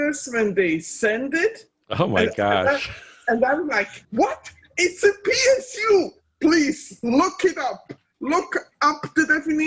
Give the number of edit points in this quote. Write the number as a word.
one